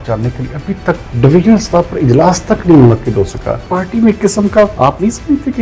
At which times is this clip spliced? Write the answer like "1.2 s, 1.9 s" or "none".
1.1 s, 3.7 s, 4.7 s